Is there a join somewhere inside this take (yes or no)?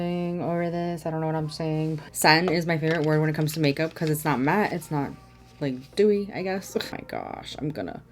yes